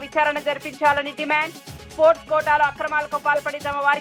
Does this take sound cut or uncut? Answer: uncut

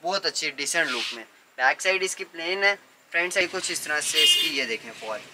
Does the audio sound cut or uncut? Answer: cut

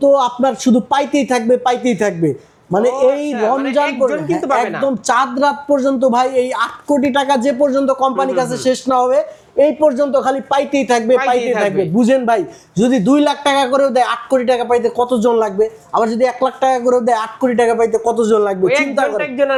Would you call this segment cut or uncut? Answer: uncut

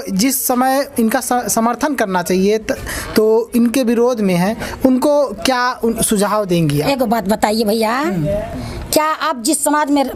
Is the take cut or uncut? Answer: uncut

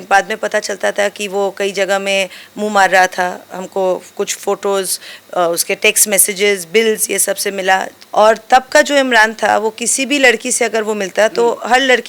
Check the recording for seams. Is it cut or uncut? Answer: cut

